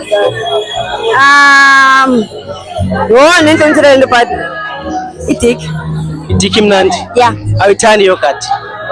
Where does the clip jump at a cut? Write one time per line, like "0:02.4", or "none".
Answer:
0:07.5

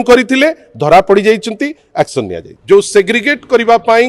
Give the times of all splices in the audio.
0:02.5

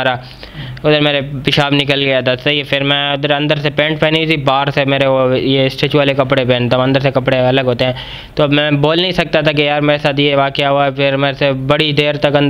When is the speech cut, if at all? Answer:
none

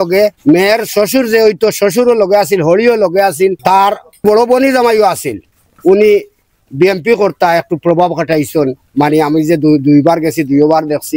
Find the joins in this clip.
none

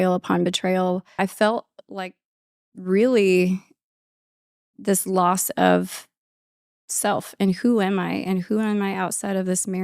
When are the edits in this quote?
0:01.2

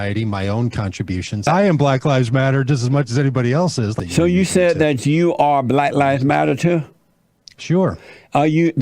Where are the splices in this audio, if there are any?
0:01.5
0:04.0

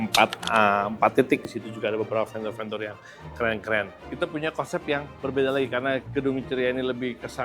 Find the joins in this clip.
0:01.5
0:04.0

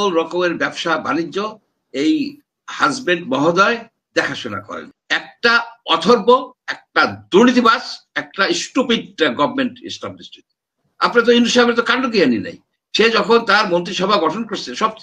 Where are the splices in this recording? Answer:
0:04.9

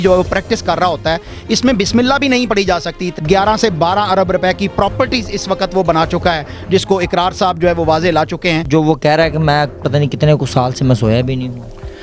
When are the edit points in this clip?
0:03.1
0:08.7

